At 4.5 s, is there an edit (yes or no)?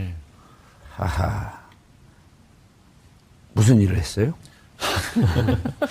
no